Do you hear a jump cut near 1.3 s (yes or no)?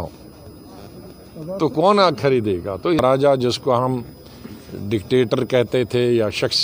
no